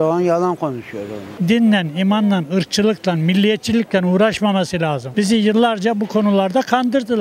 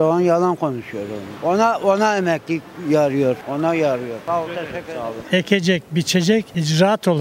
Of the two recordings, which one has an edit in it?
first; 1 cut; at 1.3 s

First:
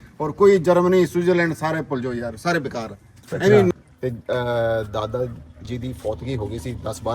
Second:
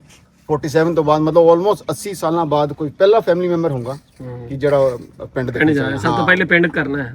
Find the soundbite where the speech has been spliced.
first; 1 cut; at 3.7 s

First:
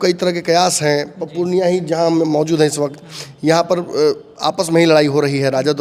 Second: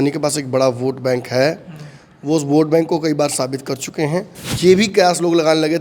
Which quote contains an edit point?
second; 1 cut; at 4.4 s

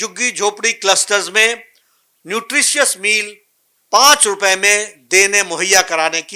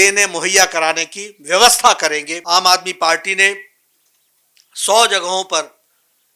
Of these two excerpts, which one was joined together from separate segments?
second; 1 cut; at 2.3 s

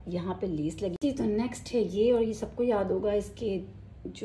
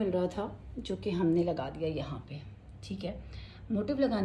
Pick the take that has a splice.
first; 1 cut; at 1.0 s

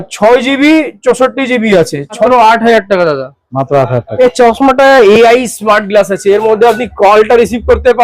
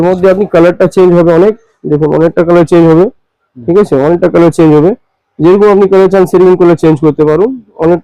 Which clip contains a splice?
first; 2 cuts; at 2.3 s, 4.1 s

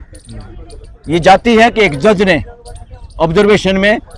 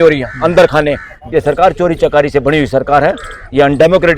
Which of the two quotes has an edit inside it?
second; 1 cut; at 1.2 s

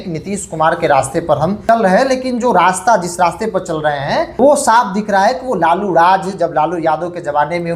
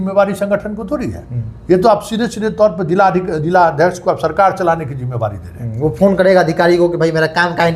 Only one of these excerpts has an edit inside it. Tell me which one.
first; 2 cuts; at 1.6 s, 4.3 s

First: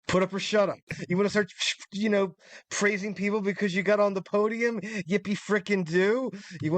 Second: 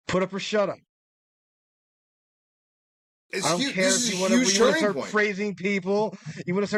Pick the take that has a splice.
first; 1 cut; at 0.9 s

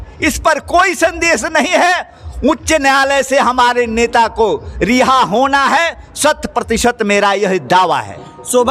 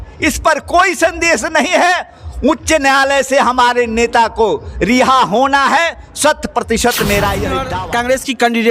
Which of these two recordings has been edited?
second; 1 cut; at 7.6 s

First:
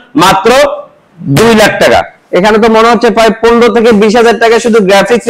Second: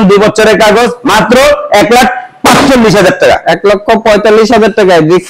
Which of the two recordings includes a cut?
second; 1 cut; at 1.0 s

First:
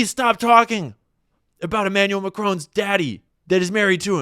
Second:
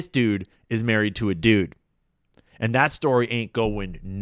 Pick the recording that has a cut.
first; 1 cut; at 3.3 s

